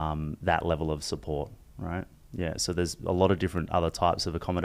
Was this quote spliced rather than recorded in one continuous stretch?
no; 0 cuts

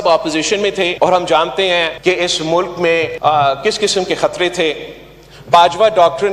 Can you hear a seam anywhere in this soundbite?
yes; 3 cuts; at 0.9 s, 1.9 s, 3.1 s

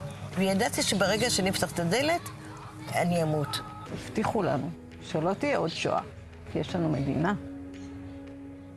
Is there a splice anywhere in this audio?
yes; 1 cut; at 3.9 s

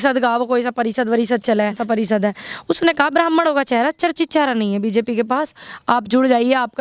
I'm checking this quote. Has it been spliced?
yes; 1 cut; at 1.8 s

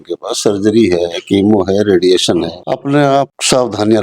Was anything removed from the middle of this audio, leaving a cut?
yes; 1 cut; at 2.7 s

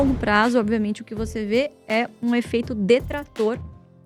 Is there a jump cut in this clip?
no; 0 cuts

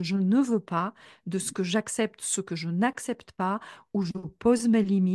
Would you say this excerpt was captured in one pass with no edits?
yes; 0 cuts

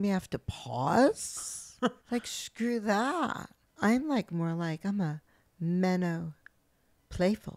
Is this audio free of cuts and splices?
no; 1 cut; at 2.0 s

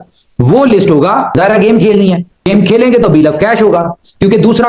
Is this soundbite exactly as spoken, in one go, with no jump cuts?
no; 1 cut; at 1.3 s

